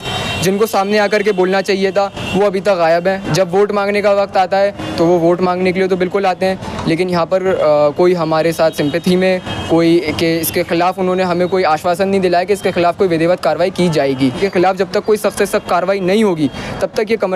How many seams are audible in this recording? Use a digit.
1